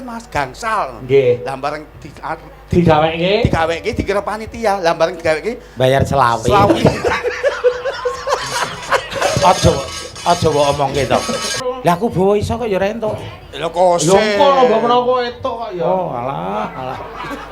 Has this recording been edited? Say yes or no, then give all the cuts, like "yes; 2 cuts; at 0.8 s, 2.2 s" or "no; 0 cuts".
yes; 1 cut; at 11.6 s